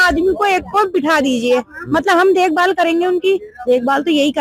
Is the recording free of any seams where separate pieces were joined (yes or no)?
yes